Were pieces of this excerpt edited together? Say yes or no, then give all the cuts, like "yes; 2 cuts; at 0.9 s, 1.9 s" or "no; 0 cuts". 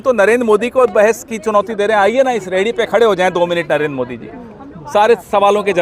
no; 0 cuts